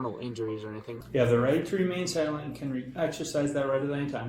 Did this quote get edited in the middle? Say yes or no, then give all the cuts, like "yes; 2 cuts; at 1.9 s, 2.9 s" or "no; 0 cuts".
yes; 1 cut; at 0.9 s